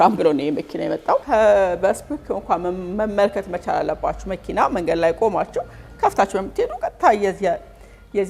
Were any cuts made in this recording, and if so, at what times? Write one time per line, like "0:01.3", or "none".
0:01.2